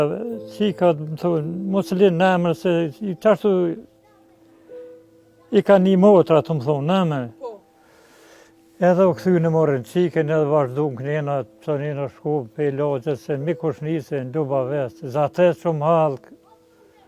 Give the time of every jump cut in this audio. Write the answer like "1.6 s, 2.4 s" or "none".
4.2 s, 5.3 s